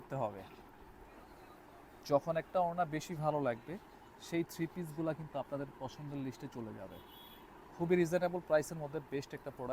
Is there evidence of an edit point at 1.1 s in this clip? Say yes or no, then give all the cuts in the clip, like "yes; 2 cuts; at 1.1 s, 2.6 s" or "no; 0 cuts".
yes; 1 cut; at 1.1 s